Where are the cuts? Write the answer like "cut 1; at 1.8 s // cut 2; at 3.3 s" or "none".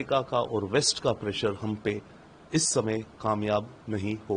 none